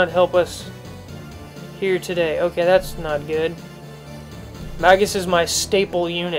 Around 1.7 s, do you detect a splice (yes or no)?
no